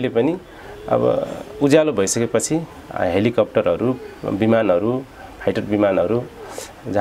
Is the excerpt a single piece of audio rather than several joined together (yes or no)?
yes